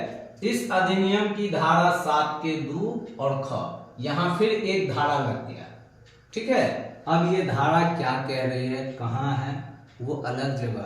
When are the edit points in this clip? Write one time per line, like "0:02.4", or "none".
0:06.9